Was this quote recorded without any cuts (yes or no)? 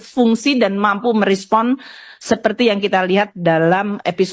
yes